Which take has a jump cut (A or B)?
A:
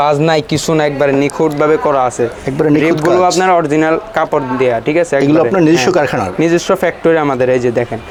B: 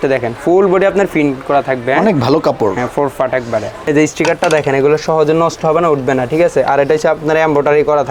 B